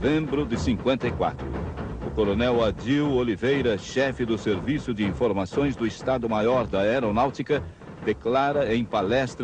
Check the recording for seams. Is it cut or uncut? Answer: cut